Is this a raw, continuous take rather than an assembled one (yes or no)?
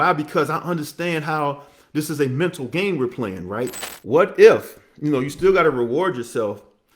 no